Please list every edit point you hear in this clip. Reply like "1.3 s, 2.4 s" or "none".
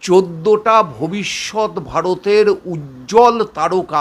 none